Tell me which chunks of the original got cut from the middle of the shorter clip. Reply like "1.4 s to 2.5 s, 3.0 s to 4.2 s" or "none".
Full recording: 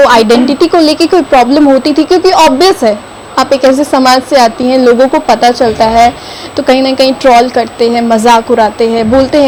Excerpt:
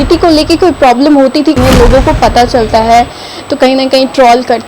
2.1 s to 4.6 s